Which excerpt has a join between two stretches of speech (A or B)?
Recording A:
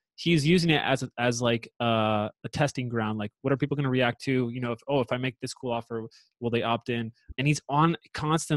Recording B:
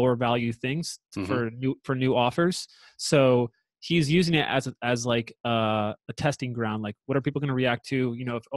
A